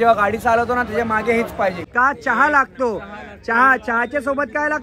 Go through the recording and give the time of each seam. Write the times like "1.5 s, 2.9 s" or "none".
1.8 s